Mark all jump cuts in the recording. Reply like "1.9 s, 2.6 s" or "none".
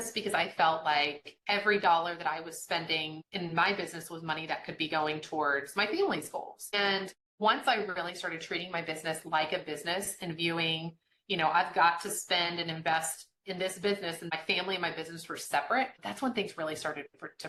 none